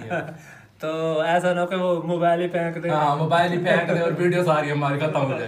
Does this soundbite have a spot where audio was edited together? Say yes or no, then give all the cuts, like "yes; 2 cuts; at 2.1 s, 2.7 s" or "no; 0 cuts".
no; 0 cuts